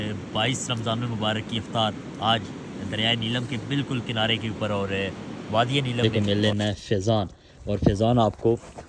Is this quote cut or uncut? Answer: cut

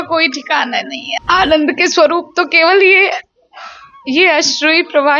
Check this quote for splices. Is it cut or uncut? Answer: cut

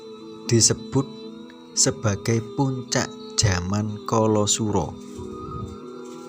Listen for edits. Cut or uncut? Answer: cut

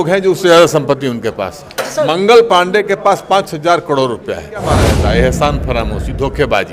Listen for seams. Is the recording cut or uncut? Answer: cut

